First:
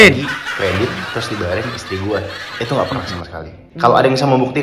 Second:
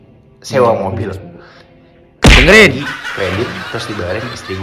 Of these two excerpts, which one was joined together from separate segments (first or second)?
first